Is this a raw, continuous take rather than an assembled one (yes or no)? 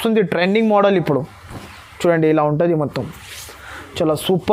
yes